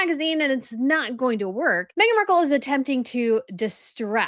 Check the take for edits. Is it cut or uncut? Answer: cut